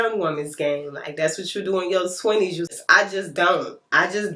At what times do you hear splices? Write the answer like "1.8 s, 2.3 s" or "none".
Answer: 2.7 s

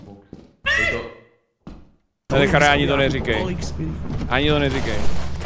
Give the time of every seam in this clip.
2.2 s

